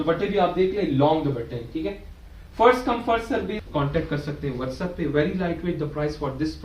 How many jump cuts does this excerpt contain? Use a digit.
1